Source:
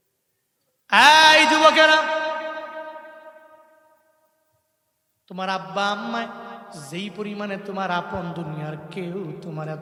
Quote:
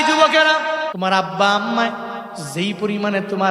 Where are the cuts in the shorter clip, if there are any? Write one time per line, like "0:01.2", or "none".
0:00.9